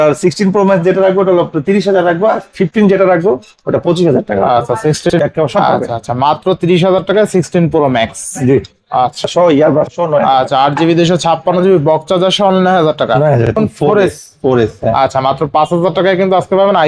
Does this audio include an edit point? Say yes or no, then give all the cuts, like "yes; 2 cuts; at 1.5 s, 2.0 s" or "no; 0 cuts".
yes; 3 cuts; at 5.1 s, 9.3 s, 13.6 s